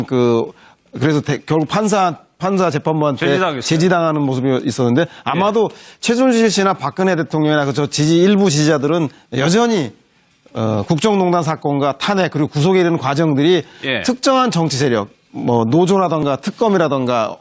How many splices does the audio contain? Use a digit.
1